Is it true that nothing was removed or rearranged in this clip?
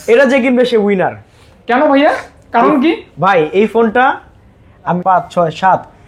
no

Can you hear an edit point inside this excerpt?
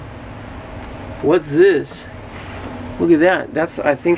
no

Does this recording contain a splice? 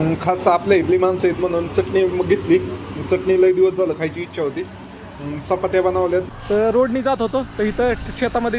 yes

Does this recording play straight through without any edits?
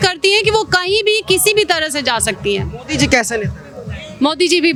yes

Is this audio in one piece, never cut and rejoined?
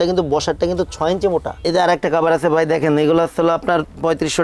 no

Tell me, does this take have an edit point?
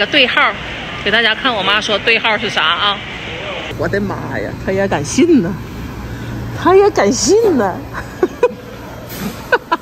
yes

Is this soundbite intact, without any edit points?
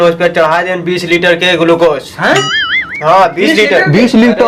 yes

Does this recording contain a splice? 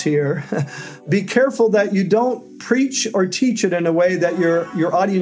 yes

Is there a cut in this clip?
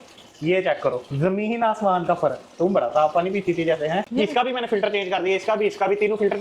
yes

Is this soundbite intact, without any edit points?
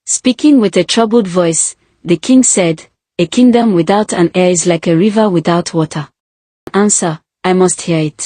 no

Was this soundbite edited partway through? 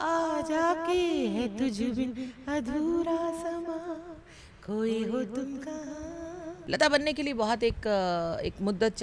yes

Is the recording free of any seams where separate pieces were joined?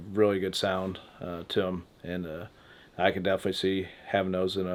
yes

